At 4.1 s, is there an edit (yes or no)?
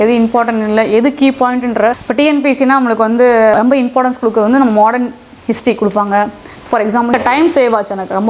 no